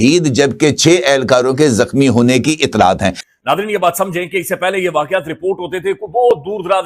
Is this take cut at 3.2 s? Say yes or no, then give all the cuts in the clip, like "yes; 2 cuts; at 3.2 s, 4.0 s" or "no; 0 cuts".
yes; 1 cut; at 3.2 s